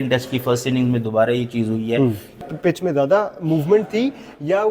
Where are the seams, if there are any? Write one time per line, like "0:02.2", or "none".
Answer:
0:02.3